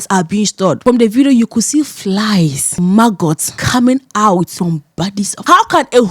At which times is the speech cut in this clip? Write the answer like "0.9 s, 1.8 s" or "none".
0.8 s, 2.6 s, 3.5 s, 5.1 s